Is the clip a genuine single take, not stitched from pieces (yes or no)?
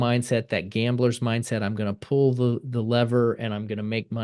yes